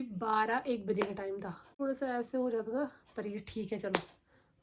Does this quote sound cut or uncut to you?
cut